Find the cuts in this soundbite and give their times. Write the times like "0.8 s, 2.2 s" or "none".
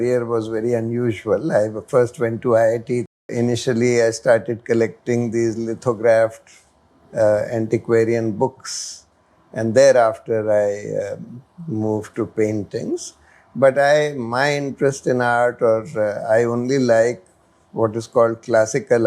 3.2 s